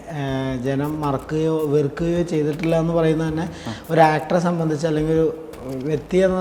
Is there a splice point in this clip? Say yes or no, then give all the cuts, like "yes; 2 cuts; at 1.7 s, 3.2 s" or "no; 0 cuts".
no; 0 cuts